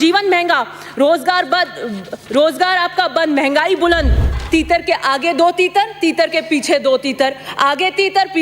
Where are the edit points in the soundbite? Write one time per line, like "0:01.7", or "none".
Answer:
0:04.3